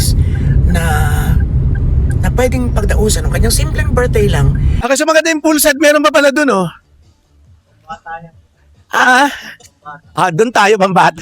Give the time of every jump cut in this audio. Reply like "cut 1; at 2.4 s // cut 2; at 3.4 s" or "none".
cut 1; at 4.7 s